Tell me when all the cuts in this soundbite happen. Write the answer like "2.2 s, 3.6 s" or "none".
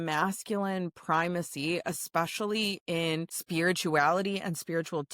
3.4 s